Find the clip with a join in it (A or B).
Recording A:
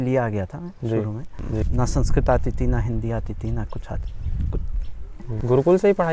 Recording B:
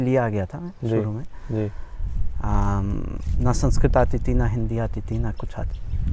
A